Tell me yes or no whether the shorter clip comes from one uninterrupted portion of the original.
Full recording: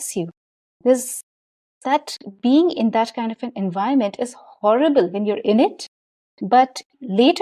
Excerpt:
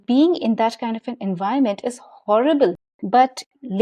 no